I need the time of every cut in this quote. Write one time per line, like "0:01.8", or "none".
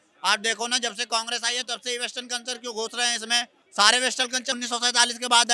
0:03.6
0:04.6